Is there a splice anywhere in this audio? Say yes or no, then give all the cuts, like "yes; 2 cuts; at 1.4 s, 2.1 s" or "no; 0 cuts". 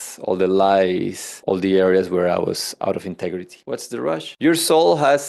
yes; 1 cut; at 3.6 s